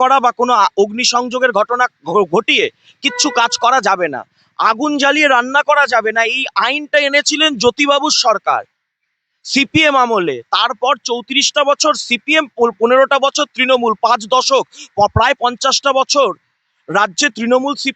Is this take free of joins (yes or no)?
yes